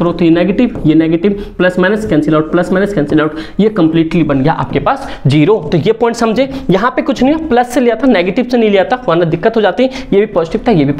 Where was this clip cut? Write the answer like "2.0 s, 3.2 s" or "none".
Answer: none